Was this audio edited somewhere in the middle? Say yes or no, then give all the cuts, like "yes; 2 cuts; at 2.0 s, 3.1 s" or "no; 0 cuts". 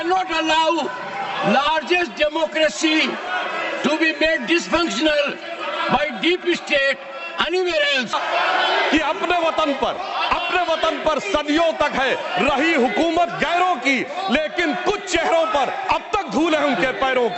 yes; 1 cut; at 8.2 s